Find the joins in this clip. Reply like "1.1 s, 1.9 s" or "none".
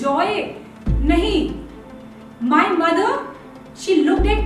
none